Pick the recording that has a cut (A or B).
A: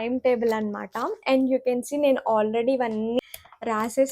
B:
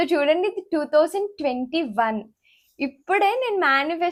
A